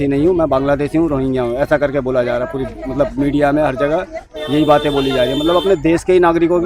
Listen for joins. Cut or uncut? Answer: uncut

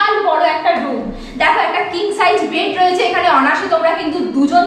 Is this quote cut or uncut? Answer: uncut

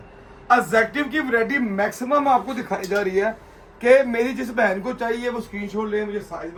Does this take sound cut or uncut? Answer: uncut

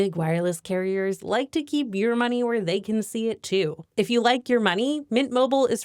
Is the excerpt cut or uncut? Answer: cut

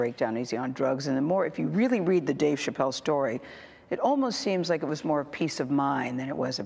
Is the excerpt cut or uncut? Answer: uncut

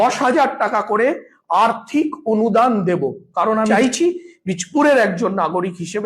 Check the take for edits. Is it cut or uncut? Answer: cut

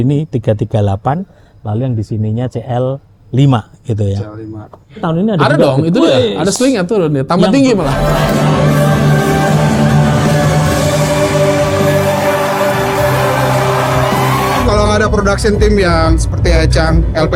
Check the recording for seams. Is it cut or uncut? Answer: cut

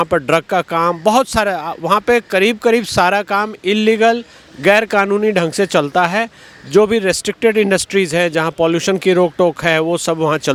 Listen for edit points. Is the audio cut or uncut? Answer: uncut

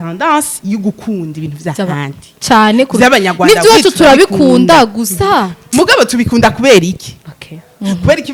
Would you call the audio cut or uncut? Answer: uncut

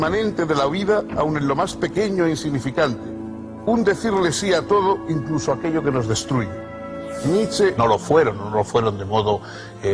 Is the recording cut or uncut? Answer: uncut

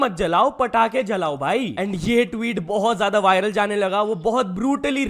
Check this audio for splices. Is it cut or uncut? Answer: uncut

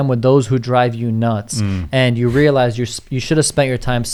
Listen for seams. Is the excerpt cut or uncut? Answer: uncut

